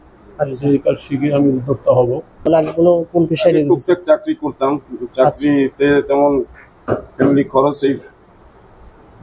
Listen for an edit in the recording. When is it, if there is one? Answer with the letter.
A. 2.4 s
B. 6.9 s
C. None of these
A